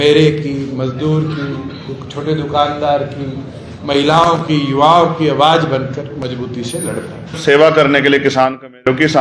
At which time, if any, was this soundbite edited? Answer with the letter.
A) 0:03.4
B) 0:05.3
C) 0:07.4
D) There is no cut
C